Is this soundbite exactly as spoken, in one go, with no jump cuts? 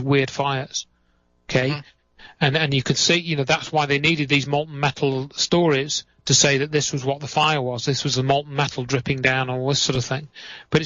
no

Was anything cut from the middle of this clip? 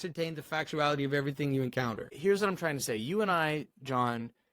yes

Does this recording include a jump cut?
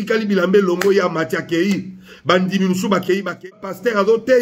yes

